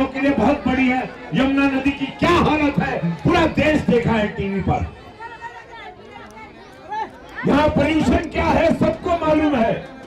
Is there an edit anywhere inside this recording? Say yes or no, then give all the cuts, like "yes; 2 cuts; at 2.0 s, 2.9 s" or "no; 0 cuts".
no; 0 cuts